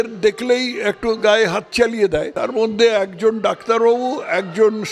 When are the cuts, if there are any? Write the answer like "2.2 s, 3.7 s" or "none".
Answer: 2.4 s